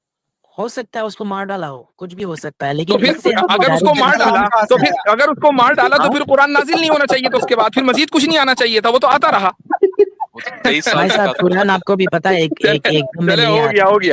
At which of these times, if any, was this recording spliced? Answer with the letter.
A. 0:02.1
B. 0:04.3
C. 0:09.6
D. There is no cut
D